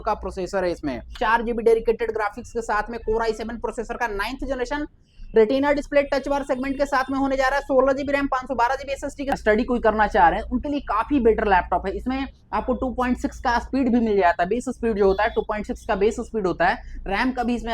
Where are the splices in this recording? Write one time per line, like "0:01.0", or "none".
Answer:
0:01.1
0:09.3